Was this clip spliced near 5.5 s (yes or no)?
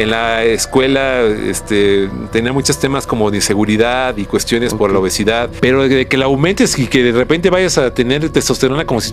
yes